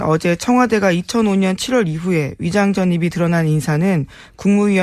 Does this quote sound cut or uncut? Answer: uncut